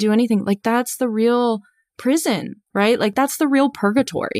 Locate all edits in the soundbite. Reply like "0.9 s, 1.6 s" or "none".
3.1 s